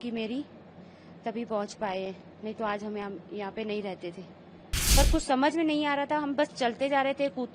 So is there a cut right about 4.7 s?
yes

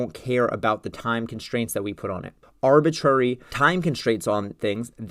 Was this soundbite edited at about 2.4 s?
yes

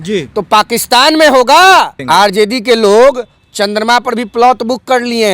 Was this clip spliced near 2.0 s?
yes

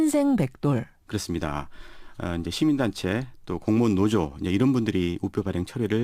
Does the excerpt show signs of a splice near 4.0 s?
yes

